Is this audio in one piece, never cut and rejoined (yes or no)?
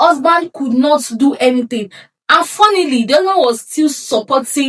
yes